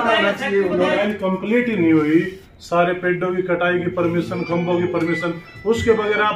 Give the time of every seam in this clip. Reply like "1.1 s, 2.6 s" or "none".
1.0 s